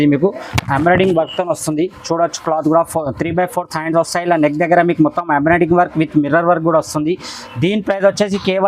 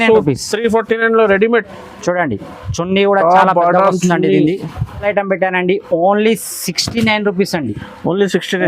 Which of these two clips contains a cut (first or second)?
second